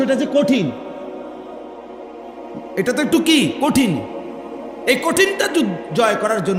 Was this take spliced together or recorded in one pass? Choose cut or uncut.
uncut